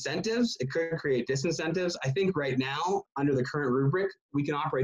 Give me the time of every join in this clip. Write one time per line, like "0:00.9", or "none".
0:03.1